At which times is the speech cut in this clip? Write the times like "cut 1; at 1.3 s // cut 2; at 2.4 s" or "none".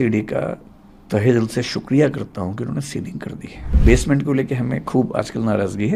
cut 1; at 3.8 s